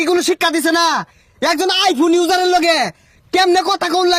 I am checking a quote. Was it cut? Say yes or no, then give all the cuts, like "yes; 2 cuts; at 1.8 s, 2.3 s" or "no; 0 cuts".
no; 0 cuts